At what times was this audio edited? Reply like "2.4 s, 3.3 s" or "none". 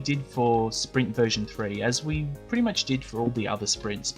1.3 s